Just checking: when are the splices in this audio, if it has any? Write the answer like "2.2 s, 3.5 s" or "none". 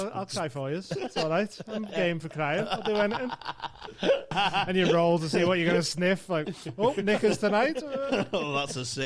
4.3 s